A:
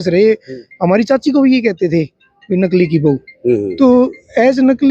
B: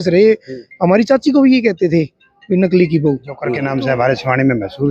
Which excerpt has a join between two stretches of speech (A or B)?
B